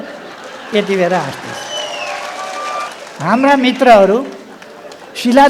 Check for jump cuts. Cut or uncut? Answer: cut